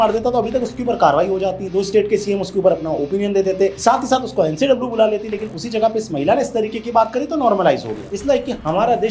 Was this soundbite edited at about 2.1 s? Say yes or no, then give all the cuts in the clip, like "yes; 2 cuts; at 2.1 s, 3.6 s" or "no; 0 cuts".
no; 2 cuts; at 3.8 s, 8.0 s